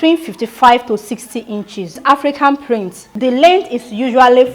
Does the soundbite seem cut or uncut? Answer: cut